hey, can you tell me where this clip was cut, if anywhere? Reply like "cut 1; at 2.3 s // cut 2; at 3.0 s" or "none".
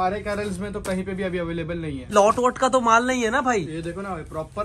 cut 1; at 2.1 s